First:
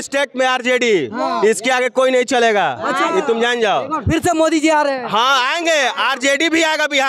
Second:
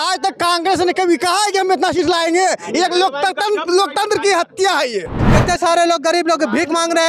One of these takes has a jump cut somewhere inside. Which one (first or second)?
second